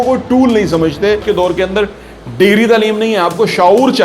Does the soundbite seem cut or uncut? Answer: cut